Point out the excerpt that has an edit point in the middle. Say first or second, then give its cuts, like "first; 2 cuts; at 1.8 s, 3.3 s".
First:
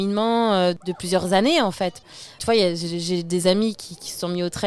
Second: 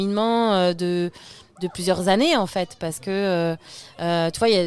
first; 2 cuts; at 0.8 s, 2.3 s